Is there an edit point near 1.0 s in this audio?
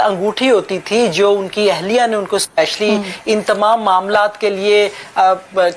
no; 0 cuts

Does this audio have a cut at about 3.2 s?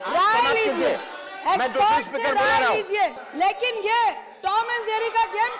yes; 1 cut; at 3.2 s

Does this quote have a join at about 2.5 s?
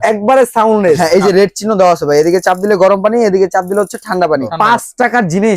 no; 2 cuts; at 1.0 s, 4.5 s

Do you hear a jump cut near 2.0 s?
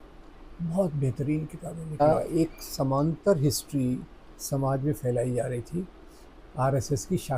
yes; 1 cut; at 2.0 s

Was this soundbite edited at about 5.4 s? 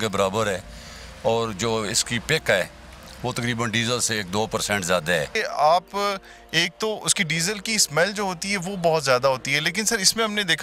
yes; 1 cut; at 5.4 s

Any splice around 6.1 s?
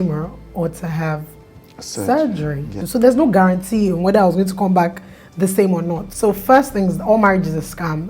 yes; 2 cuts; at 2.7 s, 6.1 s

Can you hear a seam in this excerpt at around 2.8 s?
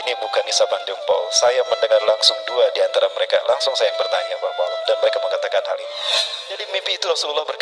no; 1 cut; at 6.2 s

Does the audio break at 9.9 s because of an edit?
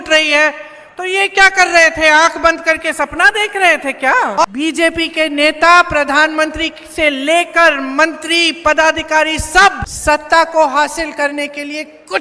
yes; 2 cuts; at 4.4 s, 9.9 s

